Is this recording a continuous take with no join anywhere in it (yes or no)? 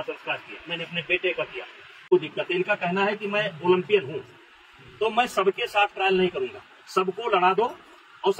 no